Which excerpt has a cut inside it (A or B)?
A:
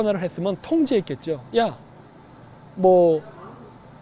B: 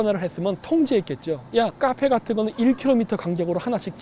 B